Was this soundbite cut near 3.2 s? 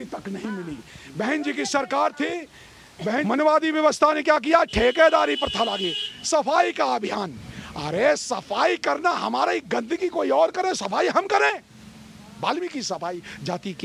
yes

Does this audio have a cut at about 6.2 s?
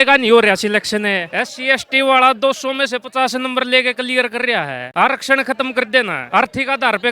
yes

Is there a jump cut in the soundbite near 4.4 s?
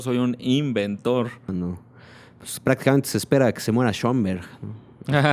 no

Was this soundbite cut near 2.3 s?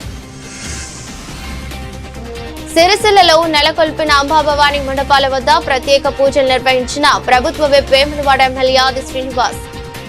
yes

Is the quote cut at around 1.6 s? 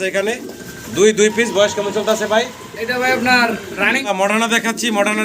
no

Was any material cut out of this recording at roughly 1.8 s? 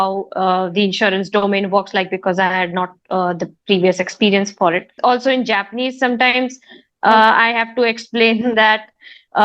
no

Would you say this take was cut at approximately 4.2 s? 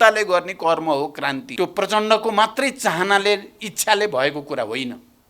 no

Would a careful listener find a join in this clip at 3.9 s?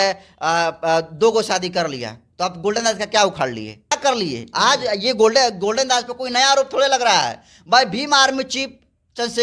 yes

